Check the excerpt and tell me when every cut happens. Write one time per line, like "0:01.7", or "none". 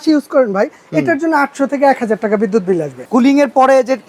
0:03.0